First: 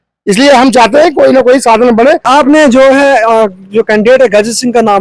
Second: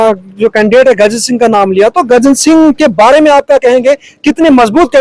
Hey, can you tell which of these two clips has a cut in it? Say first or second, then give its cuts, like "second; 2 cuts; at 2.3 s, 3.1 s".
first; 1 cut; at 2.2 s